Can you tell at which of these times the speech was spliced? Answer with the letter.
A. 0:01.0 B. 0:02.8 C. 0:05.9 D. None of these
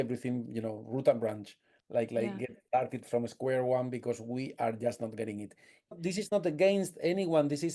C